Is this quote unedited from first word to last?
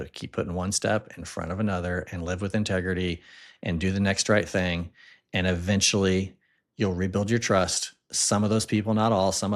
yes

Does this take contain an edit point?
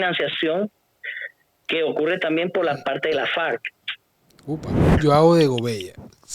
yes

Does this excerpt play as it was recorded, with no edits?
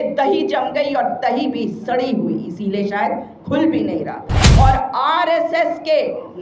no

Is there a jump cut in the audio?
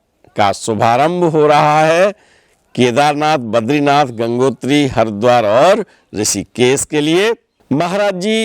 yes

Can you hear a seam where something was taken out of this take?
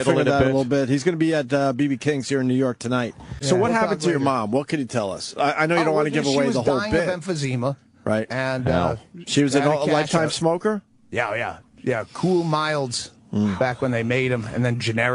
no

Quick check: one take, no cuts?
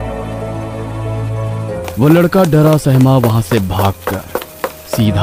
yes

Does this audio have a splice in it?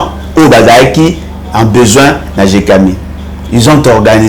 no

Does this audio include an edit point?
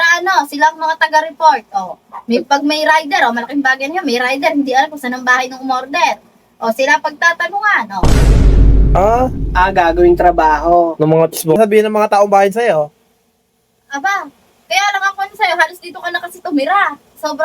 yes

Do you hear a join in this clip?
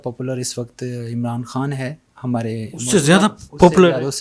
no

